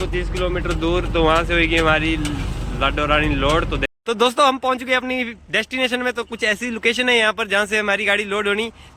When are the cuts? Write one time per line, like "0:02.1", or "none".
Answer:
0:03.9

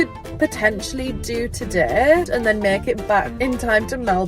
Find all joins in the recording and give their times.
0:02.3
0:03.3

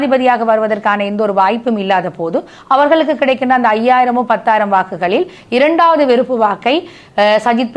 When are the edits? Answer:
none

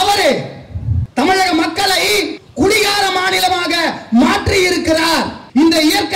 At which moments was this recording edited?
0:01.0
0:02.4

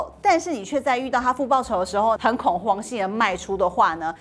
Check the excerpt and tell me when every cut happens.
0:02.2

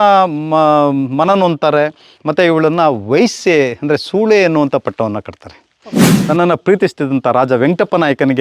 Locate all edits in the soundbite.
0:06.1

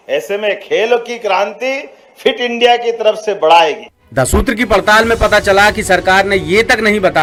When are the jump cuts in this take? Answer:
none

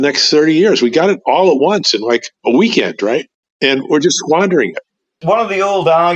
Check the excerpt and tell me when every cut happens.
0:03.4
0:05.1

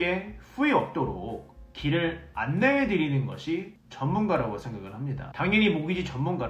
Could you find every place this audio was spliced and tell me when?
0:05.2

